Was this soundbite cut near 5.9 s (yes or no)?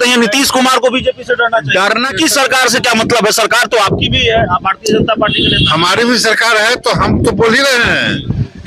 no